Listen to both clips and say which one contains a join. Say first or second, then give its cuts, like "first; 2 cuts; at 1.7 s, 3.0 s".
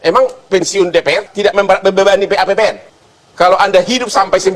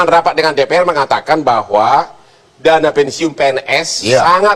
first; 1 cut; at 2.9 s